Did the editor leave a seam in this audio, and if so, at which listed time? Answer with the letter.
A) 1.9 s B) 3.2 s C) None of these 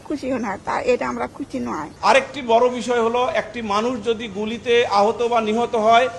A